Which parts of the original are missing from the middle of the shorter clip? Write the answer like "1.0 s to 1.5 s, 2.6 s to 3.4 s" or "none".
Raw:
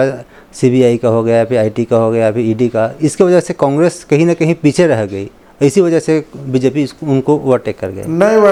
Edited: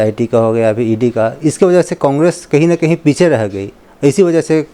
none

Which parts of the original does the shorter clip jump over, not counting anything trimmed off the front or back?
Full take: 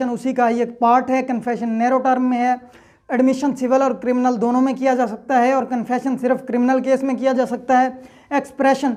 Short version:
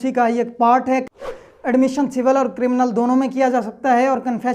1.4 s to 2.6 s

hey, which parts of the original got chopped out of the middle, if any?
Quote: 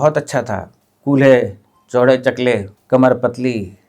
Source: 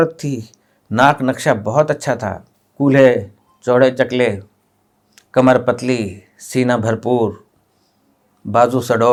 4.5 s to 5.2 s

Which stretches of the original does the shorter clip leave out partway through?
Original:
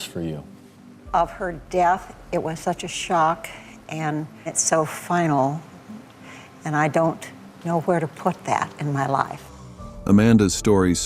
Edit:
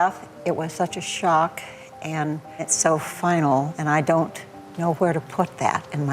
5.6 s to 6.6 s

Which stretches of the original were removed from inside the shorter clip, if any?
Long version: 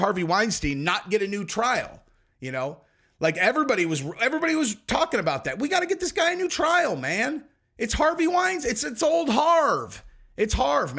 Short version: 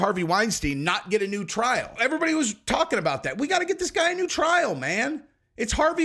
1.9 s to 4.1 s

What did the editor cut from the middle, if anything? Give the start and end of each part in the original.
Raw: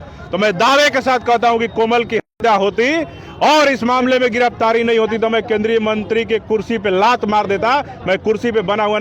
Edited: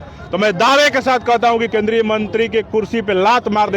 1.7 s to 5.5 s

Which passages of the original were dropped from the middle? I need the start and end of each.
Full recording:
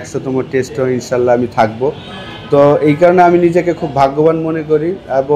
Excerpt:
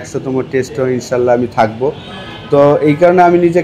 none

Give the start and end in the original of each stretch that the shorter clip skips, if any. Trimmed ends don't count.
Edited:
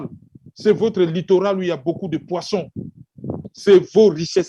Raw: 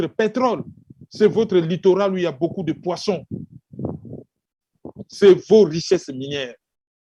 4.0 s to 5.0 s

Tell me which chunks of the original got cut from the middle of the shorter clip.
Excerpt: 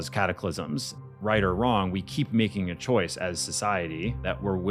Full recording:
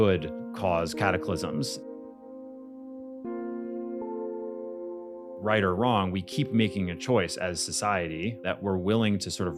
1.9 s to 5.2 s

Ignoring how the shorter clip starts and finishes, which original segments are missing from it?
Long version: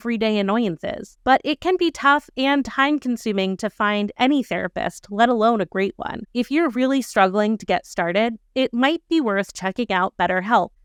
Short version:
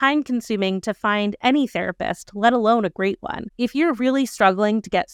none

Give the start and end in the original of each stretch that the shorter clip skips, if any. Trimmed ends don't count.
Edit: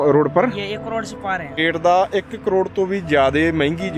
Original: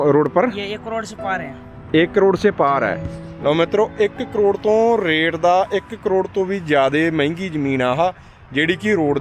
1.6 s to 5.2 s

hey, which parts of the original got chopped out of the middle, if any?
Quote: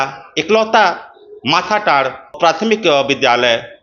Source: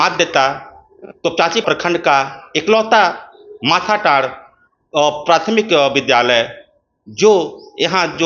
4.5 s to 5.2 s

